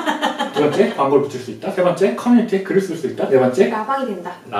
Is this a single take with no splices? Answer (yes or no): yes